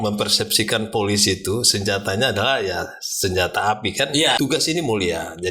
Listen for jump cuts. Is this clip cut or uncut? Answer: cut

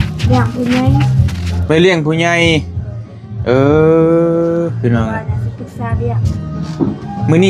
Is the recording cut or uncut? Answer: uncut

